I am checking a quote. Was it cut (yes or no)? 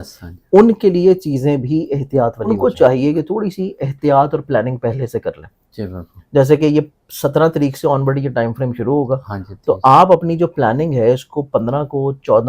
yes